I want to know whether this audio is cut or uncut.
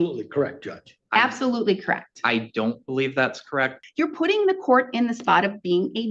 cut